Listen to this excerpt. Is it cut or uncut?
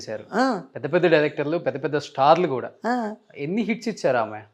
uncut